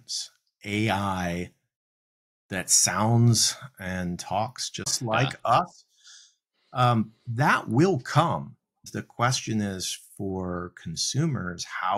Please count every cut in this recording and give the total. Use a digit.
2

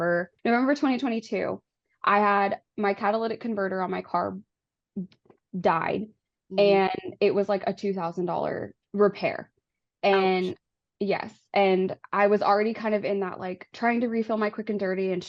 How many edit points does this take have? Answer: 0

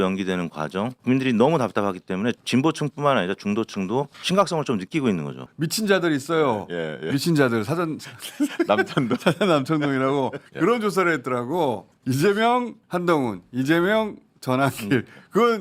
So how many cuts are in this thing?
7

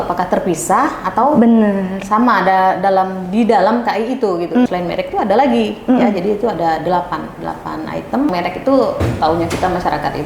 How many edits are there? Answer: 2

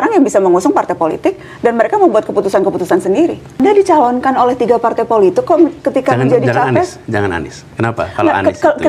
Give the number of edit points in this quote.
1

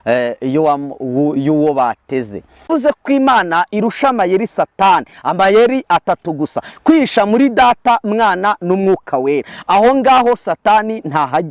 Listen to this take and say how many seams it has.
1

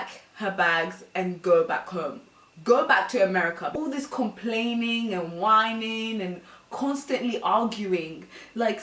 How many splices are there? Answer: 1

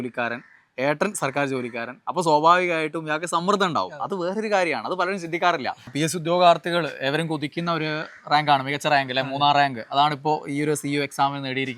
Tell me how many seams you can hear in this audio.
1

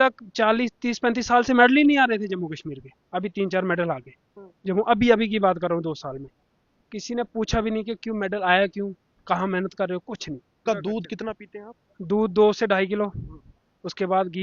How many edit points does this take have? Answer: 1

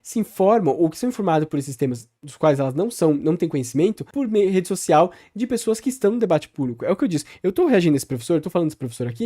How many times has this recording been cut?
1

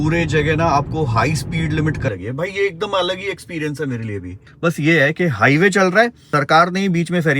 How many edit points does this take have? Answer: 3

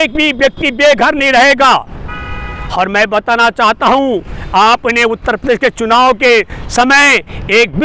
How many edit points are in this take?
0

